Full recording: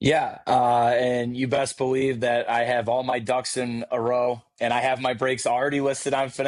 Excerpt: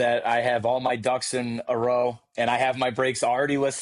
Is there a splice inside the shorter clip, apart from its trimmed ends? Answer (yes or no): no